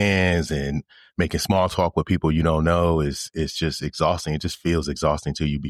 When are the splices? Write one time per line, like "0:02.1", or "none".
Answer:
none